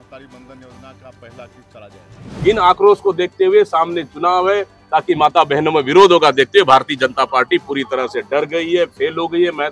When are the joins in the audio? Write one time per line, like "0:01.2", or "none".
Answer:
0:02.2